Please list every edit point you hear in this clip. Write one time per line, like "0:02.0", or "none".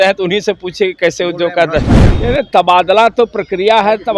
0:02.0